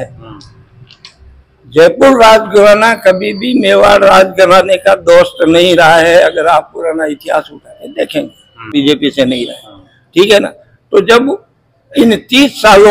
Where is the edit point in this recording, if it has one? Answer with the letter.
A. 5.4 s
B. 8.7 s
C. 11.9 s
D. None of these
B